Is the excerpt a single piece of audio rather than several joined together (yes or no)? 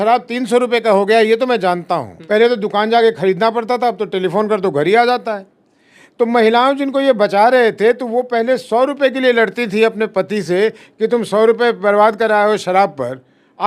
yes